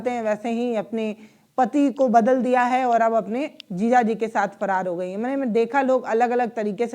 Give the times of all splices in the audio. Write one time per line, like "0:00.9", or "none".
none